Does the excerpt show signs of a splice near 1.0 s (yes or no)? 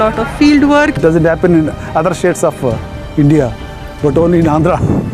yes